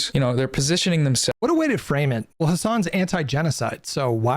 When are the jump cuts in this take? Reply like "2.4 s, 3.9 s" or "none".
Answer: 1.4 s, 2.3 s

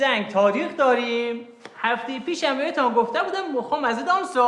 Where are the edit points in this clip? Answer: none

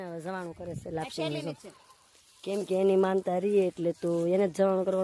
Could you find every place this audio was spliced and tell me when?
none

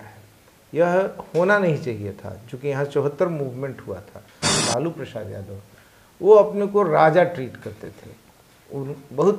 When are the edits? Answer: 4.6 s

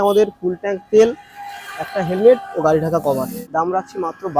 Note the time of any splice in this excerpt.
3.4 s

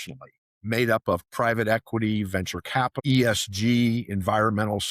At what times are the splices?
3.0 s

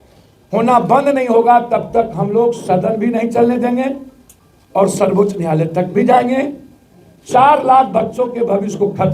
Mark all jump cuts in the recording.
none

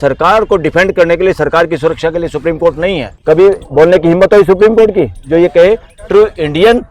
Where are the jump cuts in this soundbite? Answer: 3.1 s

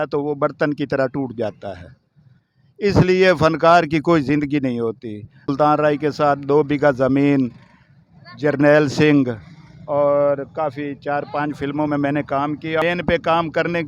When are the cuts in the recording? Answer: 5.5 s, 12.8 s

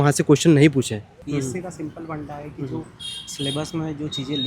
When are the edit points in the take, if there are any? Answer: 1.1 s

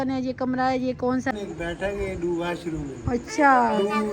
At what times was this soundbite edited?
1.3 s

